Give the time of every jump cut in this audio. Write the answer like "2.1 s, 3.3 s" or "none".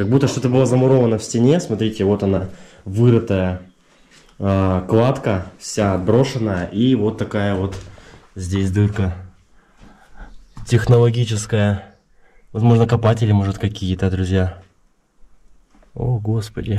none